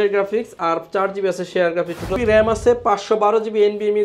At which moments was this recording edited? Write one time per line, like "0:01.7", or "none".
0:02.1